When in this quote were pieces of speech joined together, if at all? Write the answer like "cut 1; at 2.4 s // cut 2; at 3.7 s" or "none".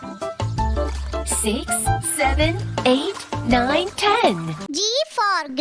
cut 1; at 4.7 s